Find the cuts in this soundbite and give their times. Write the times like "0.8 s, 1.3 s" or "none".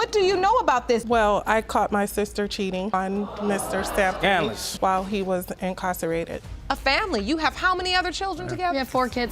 6.5 s